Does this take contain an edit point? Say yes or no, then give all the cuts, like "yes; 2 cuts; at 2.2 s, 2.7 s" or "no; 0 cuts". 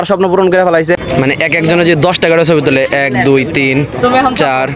yes; 1 cut; at 1.0 s